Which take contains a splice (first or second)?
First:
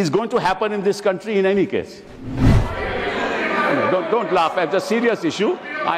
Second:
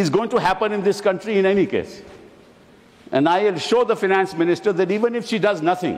first